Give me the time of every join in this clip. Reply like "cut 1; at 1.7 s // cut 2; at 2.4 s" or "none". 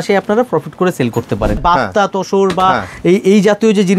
cut 1; at 1.6 s